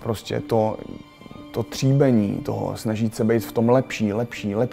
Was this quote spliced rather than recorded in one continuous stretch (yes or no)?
no